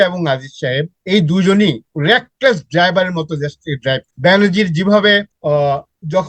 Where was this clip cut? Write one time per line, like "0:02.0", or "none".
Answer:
0:00.9
0:01.9
0:04.1
0:05.3